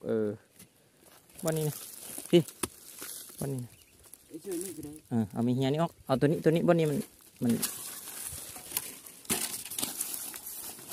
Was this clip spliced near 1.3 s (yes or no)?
yes